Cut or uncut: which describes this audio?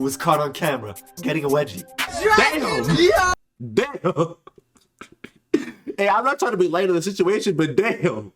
uncut